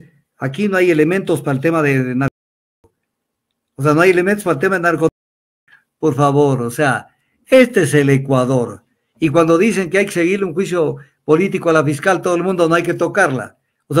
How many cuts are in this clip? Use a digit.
0